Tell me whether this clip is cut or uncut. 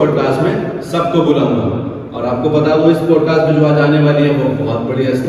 uncut